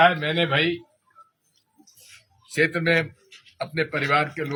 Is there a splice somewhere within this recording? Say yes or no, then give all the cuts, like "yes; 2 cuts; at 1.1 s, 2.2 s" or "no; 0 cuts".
no; 0 cuts